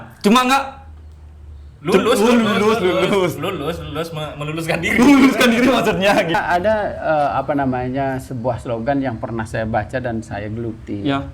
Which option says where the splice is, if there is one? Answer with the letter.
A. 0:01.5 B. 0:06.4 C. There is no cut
B